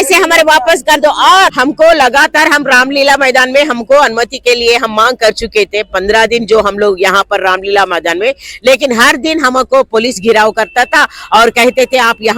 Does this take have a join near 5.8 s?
no; 1 cut; at 1.6 s

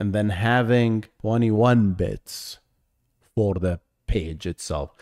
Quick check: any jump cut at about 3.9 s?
no; 1 cut; at 1.1 s

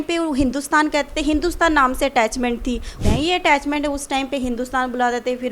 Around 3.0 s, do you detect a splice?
yes; 1 cut; at 3.0 s

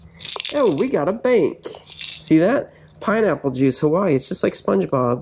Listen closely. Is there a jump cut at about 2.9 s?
no; 0 cuts

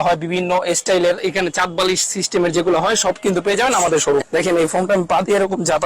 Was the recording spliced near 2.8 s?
no; 2 cuts; at 1.2 s, 4.2 s

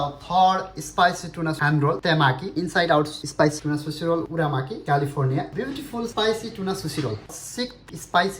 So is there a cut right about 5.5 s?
yes; 2 cuts; at 5.5 s, 7.4 s

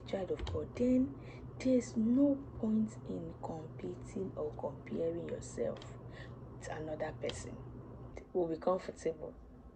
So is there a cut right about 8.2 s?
yes; 1 cut; at 8.2 s

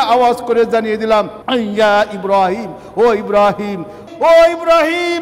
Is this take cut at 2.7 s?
no; 2 cuts; at 1.4 s, 4.0 s

